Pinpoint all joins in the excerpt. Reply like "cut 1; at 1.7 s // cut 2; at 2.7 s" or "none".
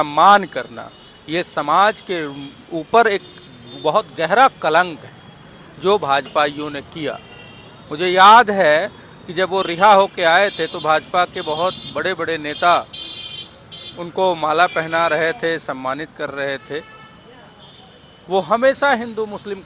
none

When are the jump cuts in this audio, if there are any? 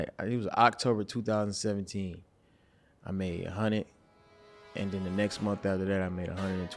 none

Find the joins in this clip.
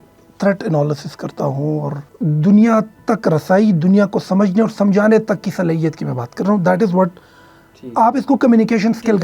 cut 1; at 2.1 s

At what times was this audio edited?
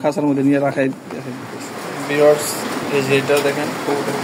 cut 1; at 2.0 s

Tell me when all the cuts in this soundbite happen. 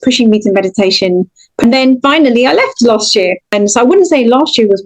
cut 1; at 1.6 s // cut 2; at 3.4 s

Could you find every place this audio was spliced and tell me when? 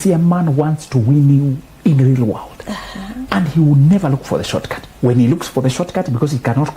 cut 1; at 3.1 s // cut 2; at 4.8 s

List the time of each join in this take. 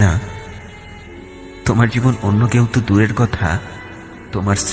none

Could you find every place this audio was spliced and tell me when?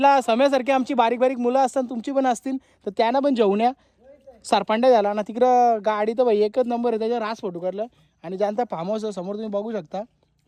none

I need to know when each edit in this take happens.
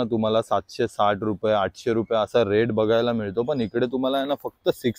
none

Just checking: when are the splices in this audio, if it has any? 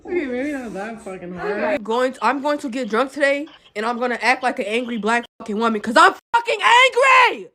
cut 1; at 1.8 s

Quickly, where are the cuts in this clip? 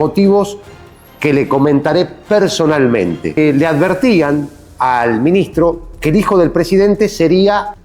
cut 1; at 3.4 s

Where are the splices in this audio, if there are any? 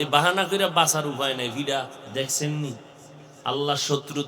cut 1; at 2.0 s

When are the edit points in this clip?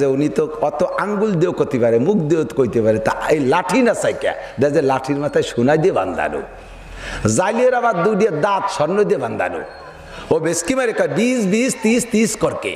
none

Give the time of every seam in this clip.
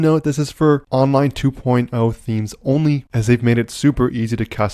none

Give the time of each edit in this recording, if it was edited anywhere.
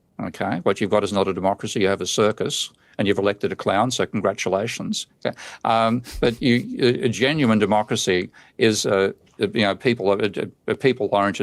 none

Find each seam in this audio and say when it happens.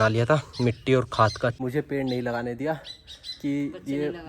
cut 1; at 1.6 s

